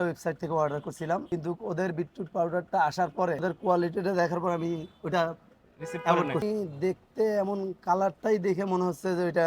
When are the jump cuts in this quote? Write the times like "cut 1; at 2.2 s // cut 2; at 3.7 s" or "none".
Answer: cut 1; at 1.2 s // cut 2; at 3.4 s // cut 3; at 6.4 s